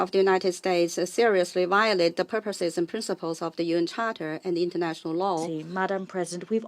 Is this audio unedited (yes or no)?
no